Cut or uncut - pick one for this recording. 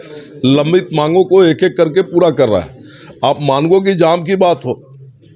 uncut